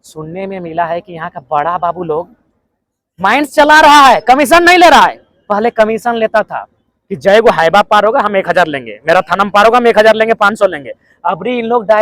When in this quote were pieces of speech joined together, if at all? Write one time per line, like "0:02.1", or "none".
none

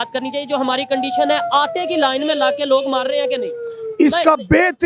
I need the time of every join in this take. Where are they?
none

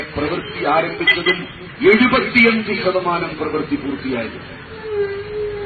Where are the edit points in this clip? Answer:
none

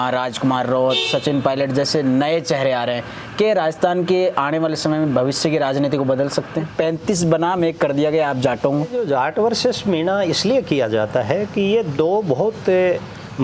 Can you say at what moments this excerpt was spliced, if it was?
0:06.7
0:09.0

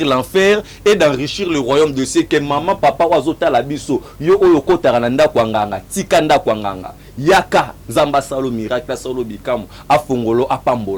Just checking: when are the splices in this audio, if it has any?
none

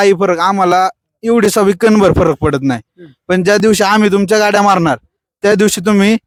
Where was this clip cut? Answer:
none

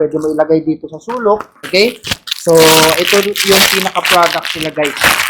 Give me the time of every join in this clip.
0:01.6

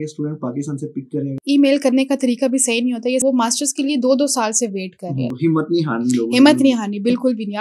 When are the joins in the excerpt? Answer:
0:01.4
0:03.2
0:05.3

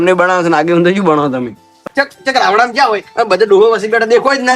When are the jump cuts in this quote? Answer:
0:01.8

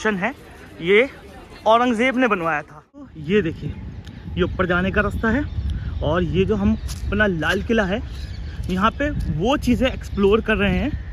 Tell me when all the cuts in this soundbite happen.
0:03.2

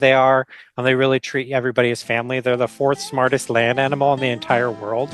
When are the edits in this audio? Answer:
none

